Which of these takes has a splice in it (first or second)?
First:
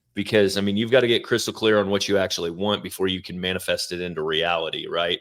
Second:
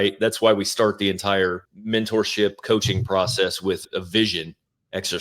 second